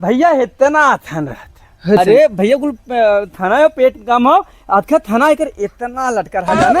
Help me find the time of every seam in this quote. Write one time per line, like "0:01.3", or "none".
0:02.0